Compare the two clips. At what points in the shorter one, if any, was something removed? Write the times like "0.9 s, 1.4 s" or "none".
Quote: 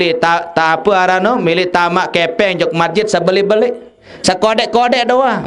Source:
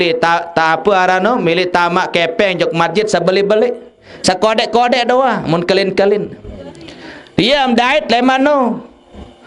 none